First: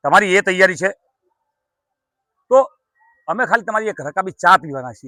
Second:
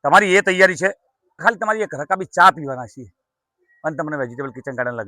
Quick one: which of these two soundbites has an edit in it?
second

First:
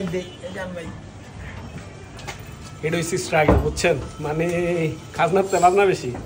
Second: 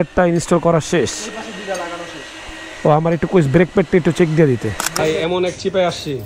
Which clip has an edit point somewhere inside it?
second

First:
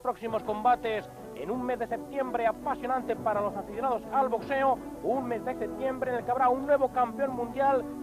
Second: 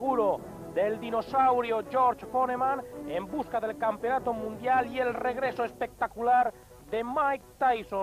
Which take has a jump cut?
second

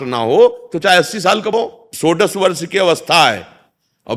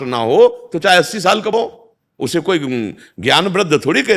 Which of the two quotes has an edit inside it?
first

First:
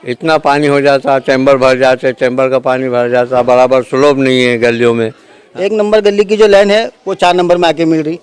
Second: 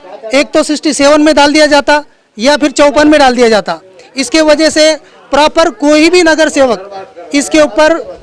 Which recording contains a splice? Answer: first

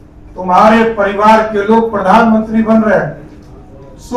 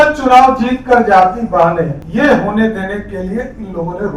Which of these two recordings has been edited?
second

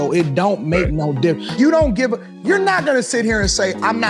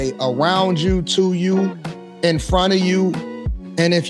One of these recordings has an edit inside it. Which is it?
first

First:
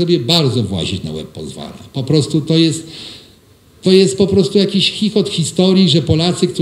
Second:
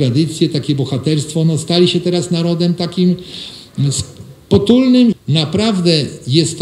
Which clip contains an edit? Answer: second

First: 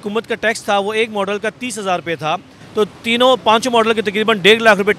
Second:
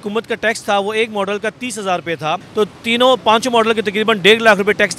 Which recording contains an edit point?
second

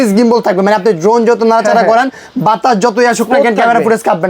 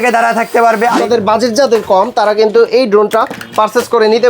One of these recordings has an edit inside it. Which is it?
second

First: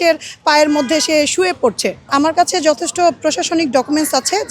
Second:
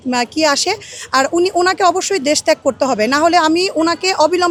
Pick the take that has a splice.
first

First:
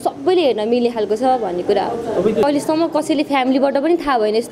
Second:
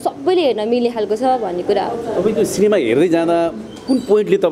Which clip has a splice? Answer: first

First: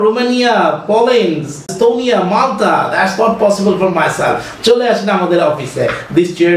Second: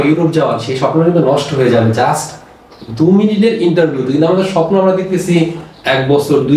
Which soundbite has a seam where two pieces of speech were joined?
first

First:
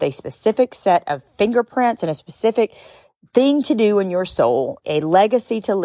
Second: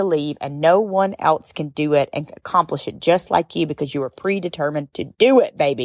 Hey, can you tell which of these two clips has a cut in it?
first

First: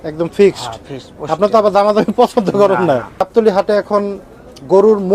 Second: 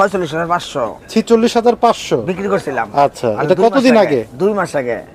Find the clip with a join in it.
first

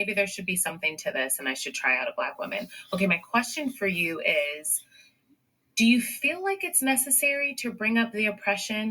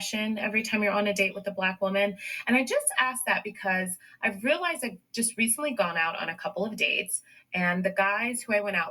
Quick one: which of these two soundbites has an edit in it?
first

